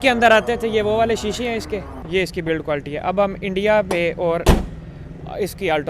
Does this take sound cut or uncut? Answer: cut